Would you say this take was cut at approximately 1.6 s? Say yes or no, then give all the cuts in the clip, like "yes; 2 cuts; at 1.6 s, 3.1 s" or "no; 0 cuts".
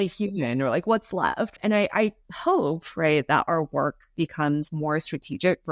yes; 1 cut; at 1.6 s